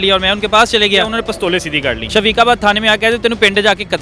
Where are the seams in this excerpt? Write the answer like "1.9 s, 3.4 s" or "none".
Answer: 1.5 s